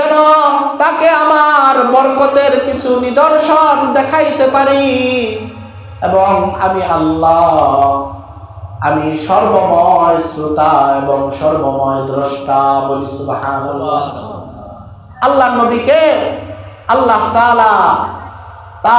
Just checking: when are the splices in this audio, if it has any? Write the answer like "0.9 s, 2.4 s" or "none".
none